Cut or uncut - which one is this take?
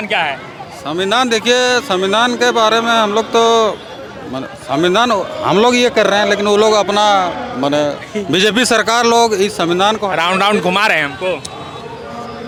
uncut